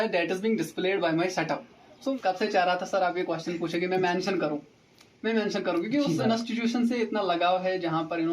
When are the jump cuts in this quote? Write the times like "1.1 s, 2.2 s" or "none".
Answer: 2.2 s